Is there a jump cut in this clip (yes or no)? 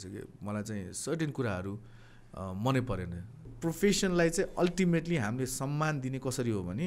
yes